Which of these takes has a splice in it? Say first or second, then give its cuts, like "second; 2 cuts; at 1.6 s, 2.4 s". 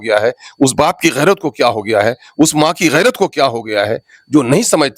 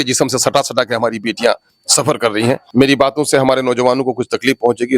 second; 1 cut; at 2.6 s